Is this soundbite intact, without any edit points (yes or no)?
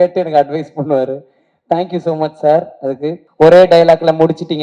no